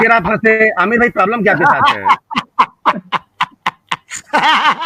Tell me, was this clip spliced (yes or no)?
no